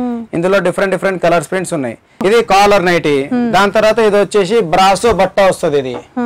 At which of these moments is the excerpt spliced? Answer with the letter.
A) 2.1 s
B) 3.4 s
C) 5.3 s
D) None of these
A